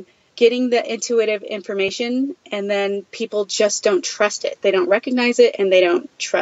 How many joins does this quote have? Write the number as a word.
zero